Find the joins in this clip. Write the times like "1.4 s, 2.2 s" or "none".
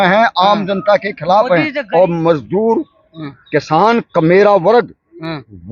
1.8 s